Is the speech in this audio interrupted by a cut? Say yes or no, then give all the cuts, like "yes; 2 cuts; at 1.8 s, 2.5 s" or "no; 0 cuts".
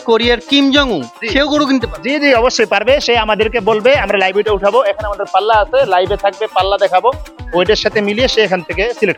no; 0 cuts